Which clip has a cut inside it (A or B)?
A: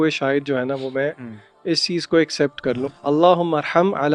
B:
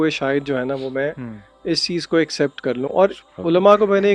A